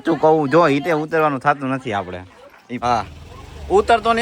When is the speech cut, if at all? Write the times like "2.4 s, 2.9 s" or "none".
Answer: 2.8 s